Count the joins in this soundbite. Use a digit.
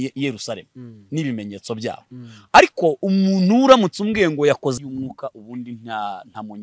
1